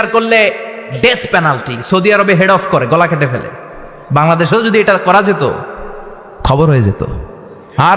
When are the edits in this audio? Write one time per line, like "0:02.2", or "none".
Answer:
none